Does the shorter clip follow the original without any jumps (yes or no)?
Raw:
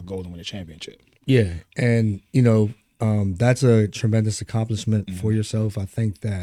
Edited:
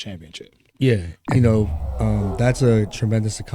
no